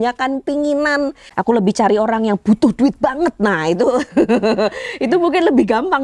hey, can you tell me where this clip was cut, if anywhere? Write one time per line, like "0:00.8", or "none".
0:01.2